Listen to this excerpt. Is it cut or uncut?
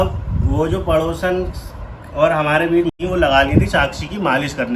cut